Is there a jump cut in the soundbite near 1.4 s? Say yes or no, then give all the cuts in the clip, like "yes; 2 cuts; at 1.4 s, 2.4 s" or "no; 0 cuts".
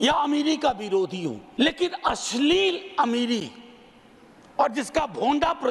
yes; 1 cut; at 1.4 s